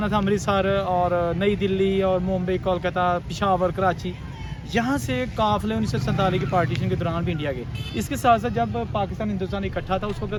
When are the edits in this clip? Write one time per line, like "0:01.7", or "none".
none